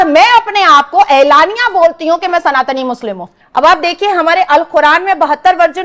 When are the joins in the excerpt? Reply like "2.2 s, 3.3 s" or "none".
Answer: 3.4 s